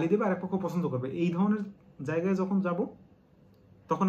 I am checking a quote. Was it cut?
no; 0 cuts

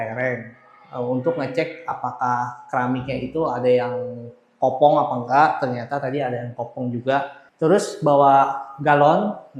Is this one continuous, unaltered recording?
no; 1 cut; at 7.4 s

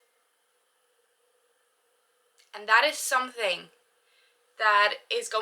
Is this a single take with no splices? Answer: yes; 0 cuts

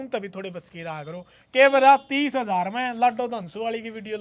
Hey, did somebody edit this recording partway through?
no; 0 cuts

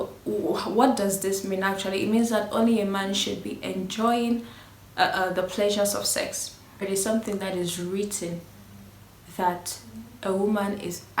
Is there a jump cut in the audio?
yes; 1 cut; at 6.8 s

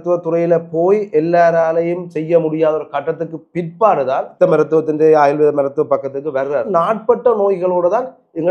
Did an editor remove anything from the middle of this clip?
yes; 2 cuts; at 4.3 s, 6.7 s

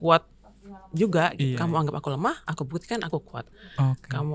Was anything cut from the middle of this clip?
yes; 1 cut; at 1.5 s

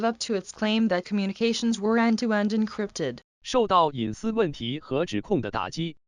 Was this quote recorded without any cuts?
yes; 0 cuts

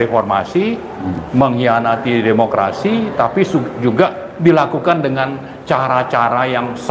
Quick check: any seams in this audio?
no; 0 cuts

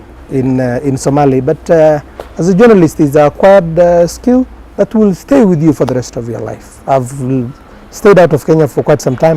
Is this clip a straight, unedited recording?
yes; 0 cuts

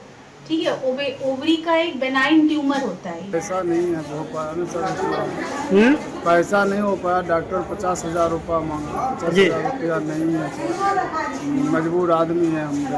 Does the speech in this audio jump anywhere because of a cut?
yes; 1 cut; at 3.3 s

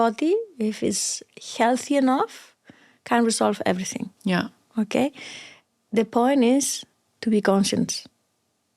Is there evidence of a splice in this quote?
no; 0 cuts

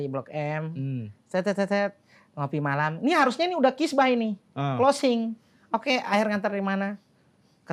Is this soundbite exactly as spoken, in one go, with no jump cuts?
yes; 0 cuts

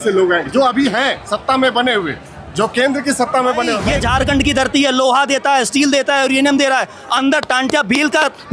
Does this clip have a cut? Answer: yes; 1 cut; at 3.8 s

